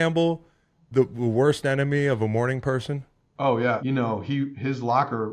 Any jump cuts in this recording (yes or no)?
yes